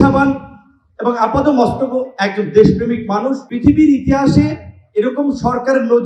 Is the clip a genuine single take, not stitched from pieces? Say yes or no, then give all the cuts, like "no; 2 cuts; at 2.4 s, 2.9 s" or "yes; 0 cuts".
no; 1 cut; at 3.5 s